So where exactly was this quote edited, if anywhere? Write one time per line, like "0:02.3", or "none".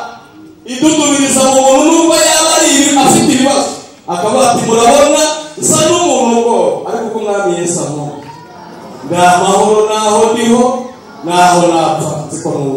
none